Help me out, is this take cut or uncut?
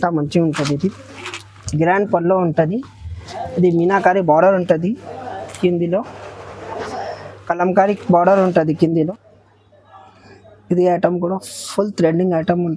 cut